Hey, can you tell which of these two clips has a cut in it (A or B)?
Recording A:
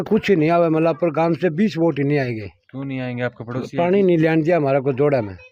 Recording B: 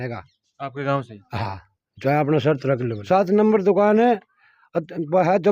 B